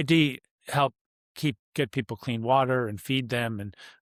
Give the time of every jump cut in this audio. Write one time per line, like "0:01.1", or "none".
none